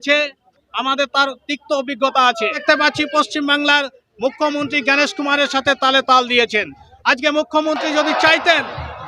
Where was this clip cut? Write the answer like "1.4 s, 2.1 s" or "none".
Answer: 2.6 s